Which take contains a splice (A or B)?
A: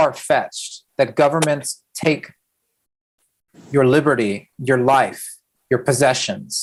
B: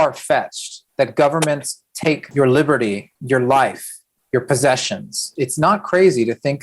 B